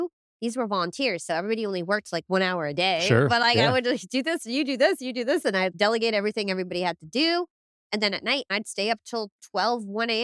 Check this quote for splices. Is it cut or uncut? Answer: cut